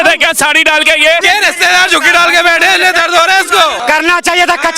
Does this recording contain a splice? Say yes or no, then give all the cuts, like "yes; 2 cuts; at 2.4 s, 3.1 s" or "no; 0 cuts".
yes; 2 cuts; at 1.2 s, 3.8 s